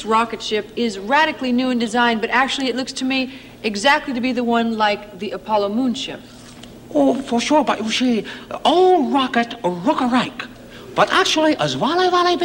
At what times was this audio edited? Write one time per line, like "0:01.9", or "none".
0:07.9

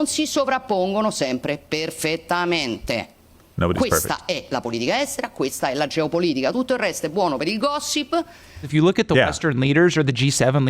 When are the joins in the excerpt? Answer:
0:08.7

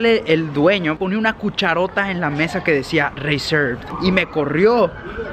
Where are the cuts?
0:01.0
0:03.9

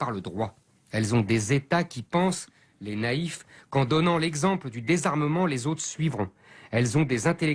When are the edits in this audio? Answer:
0:02.0

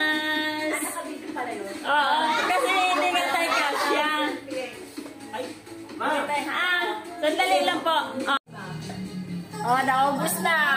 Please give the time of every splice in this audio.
0:08.4

